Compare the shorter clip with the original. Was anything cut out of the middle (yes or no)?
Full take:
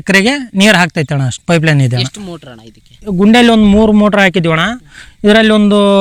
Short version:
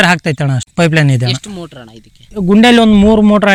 no